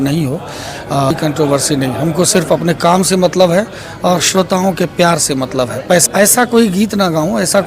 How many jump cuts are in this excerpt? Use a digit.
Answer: 2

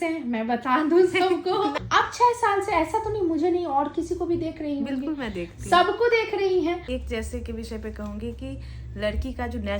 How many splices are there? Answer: 2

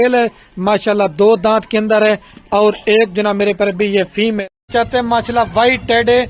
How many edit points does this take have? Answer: 1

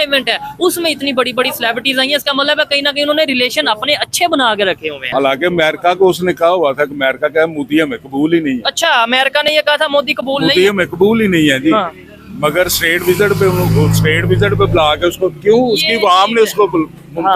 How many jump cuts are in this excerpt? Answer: 1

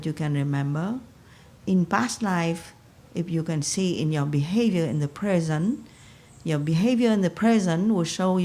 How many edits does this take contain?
0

